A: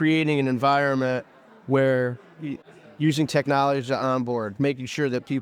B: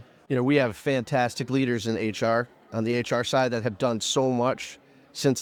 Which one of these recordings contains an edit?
A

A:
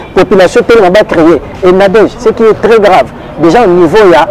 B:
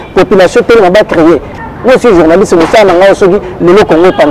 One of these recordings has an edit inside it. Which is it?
B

